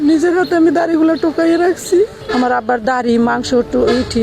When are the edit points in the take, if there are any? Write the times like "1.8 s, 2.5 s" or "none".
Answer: 2.2 s